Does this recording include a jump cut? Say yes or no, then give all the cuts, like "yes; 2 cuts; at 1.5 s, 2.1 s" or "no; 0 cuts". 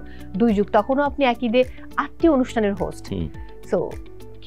no; 0 cuts